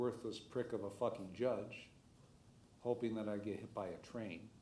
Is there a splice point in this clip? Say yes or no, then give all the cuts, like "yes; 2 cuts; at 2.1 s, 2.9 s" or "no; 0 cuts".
no; 0 cuts